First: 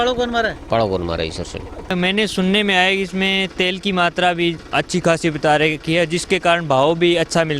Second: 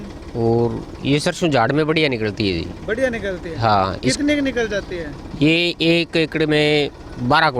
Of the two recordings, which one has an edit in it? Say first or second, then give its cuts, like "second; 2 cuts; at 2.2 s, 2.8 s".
first; 1 cut; at 1.8 s